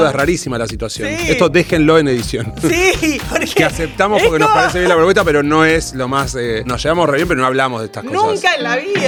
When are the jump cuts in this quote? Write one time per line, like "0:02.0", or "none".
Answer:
none